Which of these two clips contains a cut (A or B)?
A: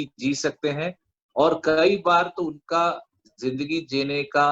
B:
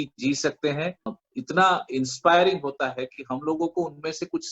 B